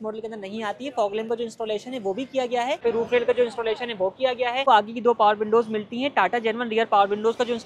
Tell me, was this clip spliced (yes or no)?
yes